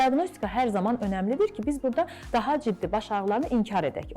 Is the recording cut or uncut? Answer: cut